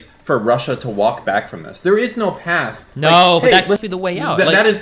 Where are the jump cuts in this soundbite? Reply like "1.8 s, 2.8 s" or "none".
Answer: 3.8 s